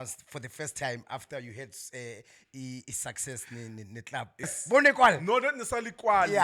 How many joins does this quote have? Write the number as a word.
one